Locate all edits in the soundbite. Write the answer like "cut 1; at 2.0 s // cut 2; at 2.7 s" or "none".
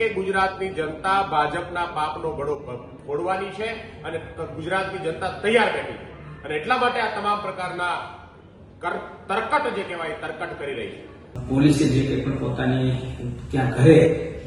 cut 1; at 11.4 s